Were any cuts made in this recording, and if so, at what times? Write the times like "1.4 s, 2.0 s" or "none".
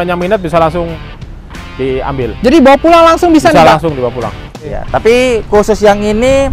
4.4 s